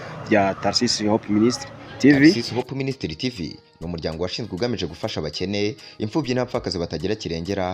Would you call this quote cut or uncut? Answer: cut